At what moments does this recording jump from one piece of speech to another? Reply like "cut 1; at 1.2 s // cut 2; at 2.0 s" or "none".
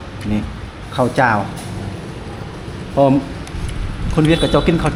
none